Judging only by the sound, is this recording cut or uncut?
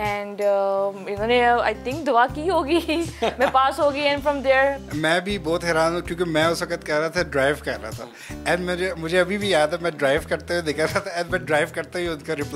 cut